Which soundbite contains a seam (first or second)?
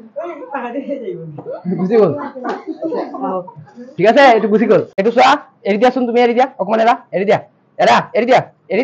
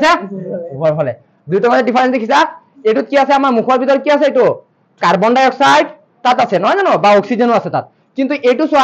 first